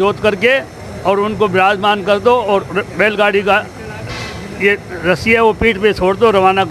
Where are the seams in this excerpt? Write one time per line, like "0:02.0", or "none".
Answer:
none

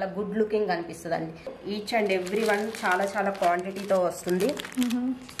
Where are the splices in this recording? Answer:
0:01.5

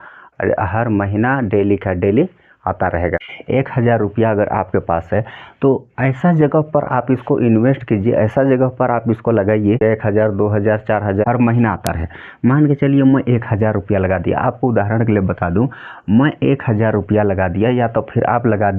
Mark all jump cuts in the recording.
0:03.3
0:09.8
0:11.2

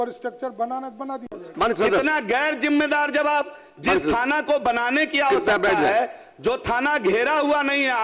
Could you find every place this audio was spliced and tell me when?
0:01.5

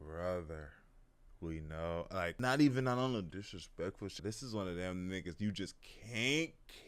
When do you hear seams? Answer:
0:02.4
0:04.1

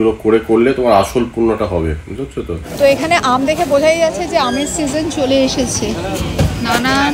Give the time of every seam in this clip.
0:02.6

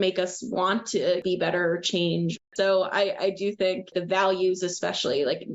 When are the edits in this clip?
0:01.2
0:02.4
0:03.9

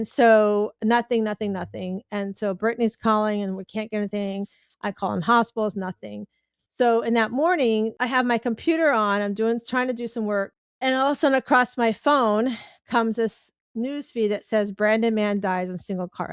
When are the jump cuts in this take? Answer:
0:07.9
0:10.6

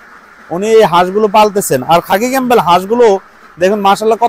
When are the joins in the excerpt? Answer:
none

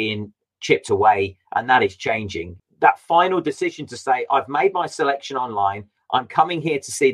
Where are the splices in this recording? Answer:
0:02.6

